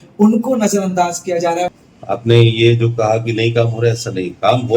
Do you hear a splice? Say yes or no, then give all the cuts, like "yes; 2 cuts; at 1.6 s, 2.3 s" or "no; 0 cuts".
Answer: yes; 1 cut; at 1.8 s